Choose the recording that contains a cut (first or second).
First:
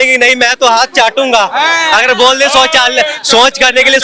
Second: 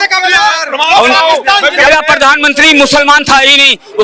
second